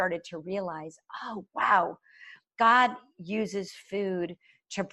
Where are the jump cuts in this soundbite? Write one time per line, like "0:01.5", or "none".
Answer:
none

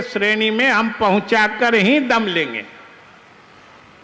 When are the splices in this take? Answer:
none

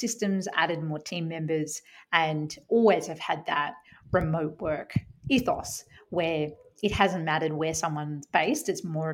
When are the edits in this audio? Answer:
none

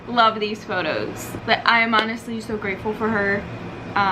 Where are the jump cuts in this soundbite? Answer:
0:01.3

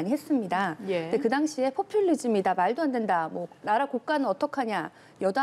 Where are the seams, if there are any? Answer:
none

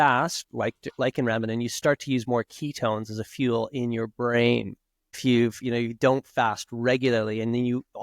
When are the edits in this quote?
0:05.2

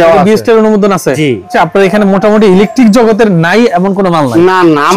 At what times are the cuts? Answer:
0:01.5

